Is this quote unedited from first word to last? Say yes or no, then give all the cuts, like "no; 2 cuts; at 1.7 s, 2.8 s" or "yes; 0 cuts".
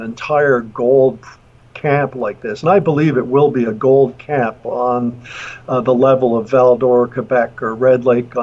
yes; 0 cuts